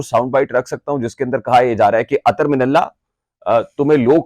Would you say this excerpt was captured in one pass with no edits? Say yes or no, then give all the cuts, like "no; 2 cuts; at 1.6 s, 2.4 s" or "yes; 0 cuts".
yes; 0 cuts